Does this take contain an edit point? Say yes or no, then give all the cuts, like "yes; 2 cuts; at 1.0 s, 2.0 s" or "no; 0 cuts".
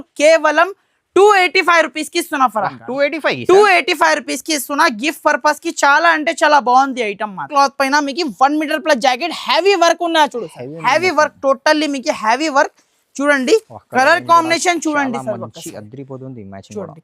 yes; 1 cut; at 7.5 s